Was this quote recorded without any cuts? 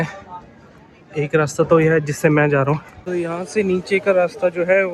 no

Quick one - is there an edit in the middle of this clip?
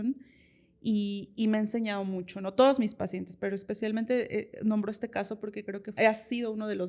yes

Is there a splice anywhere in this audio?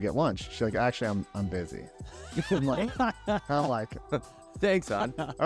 no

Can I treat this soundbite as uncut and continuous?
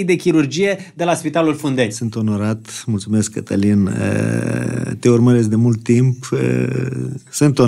no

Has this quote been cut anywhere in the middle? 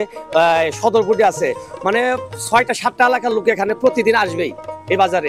no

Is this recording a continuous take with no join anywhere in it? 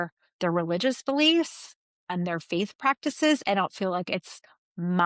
yes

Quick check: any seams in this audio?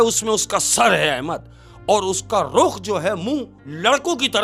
no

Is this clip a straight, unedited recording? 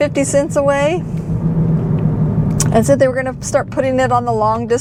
yes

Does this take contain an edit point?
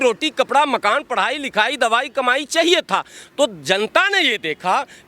no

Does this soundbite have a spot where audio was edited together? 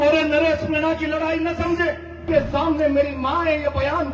yes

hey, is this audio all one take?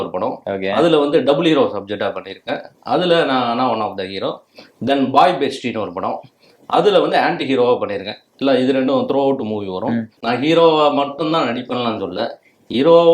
no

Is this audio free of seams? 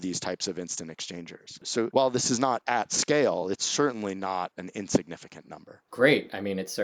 yes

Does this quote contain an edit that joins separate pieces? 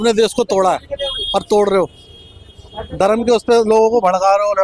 no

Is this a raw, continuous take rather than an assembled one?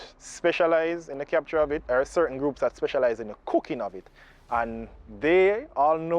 no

